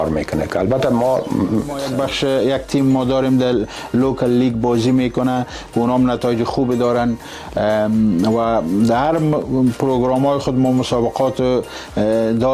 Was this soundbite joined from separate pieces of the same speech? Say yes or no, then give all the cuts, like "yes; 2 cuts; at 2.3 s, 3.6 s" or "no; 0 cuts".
yes; 1 cut; at 1.8 s